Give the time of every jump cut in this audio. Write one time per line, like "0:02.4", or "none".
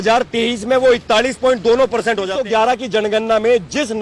0:02.3